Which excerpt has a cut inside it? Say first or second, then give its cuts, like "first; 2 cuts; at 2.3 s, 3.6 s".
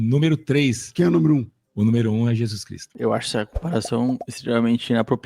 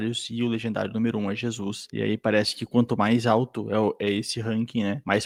first; 2 cuts; at 0.8 s, 2.9 s